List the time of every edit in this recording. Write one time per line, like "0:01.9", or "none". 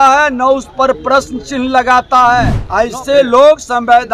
0:02.6